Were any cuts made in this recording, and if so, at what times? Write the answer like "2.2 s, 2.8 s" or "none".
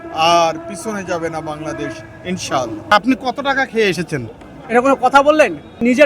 2.8 s